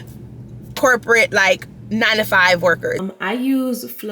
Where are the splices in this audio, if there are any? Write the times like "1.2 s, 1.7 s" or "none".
3.0 s